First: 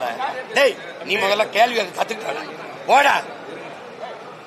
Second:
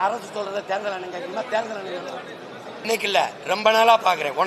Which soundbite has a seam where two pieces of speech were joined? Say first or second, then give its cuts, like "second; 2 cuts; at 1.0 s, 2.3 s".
second; 1 cut; at 2.8 s